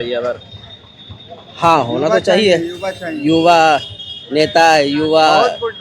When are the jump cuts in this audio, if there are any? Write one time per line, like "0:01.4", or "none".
none

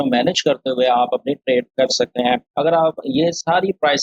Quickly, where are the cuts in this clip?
0:02.5

